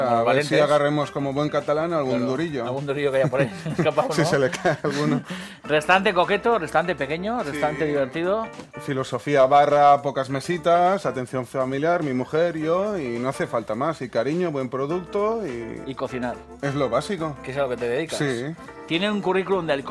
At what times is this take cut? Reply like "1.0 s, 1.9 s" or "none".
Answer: none

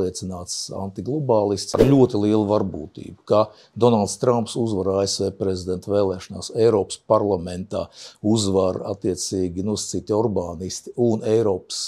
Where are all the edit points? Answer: 1.7 s

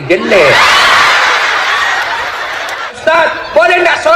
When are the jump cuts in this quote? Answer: 3.0 s

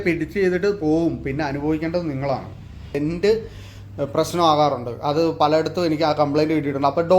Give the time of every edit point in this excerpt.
3.0 s

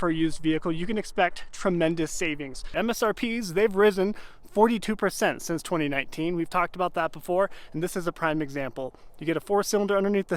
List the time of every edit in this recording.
2.6 s

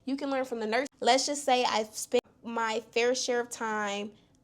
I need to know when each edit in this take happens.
0.9 s, 2.2 s

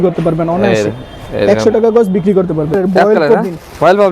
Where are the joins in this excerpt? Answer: 2.7 s

